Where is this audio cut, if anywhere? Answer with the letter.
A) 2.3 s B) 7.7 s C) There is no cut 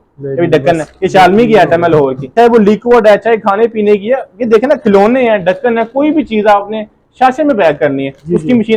A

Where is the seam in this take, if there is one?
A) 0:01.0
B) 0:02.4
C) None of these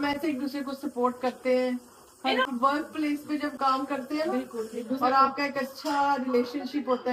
B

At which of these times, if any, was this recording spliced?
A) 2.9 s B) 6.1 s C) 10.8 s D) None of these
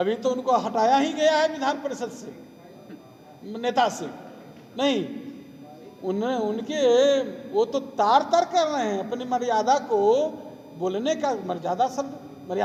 D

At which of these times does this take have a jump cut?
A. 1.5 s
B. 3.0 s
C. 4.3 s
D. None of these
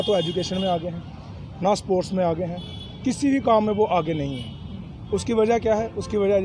D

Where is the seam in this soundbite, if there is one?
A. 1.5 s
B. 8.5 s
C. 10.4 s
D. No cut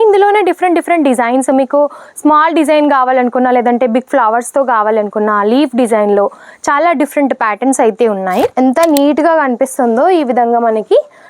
B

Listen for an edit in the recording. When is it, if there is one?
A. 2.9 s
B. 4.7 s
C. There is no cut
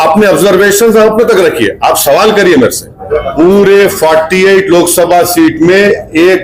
A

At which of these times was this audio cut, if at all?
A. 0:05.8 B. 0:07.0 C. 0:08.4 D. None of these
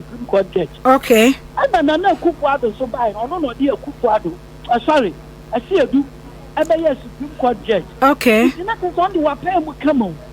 C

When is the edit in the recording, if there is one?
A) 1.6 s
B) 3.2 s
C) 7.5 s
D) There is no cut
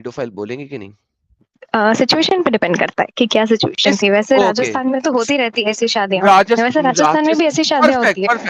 A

